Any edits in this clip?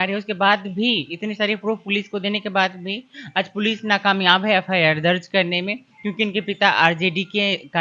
no; 0 cuts

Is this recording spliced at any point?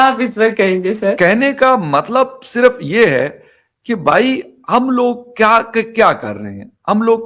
yes; 1 cut; at 1.2 s

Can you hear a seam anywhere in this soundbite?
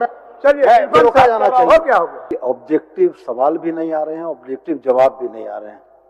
yes; 1 cut; at 2.3 s

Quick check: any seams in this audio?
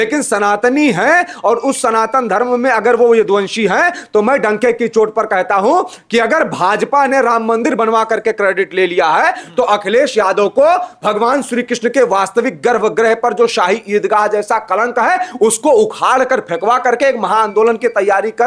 no; 0 cuts

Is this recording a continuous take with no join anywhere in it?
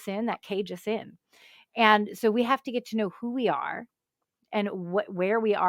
yes; 0 cuts

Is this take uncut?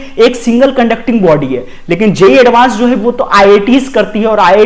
yes; 0 cuts

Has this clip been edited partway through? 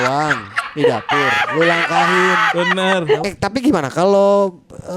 yes; 1 cut; at 3.3 s

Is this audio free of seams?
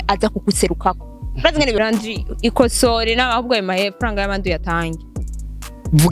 no; 1 cut; at 1.8 s

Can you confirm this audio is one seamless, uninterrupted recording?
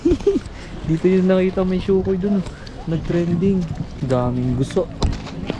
no; 1 cut; at 3.9 s

